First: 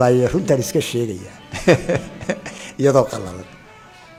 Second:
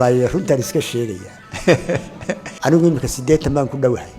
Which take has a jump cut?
second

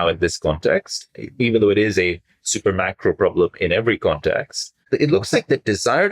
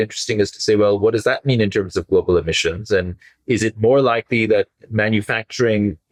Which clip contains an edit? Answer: first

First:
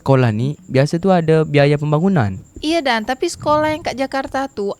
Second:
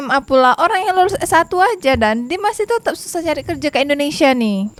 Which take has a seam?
first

